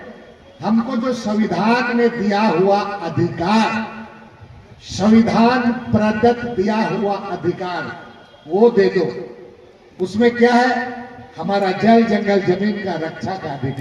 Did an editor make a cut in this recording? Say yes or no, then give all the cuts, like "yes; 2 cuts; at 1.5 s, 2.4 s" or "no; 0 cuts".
no; 0 cuts